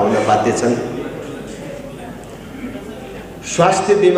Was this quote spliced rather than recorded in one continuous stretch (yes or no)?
no